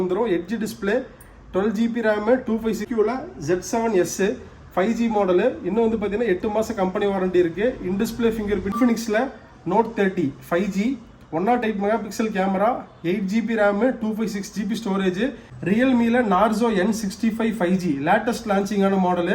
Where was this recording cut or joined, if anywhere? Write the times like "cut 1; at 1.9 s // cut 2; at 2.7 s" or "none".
cut 1; at 2.9 s // cut 2; at 8.8 s // cut 3; at 15.5 s